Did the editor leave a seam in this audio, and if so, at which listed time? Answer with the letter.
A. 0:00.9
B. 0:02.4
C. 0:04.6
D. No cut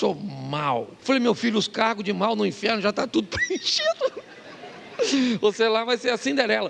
A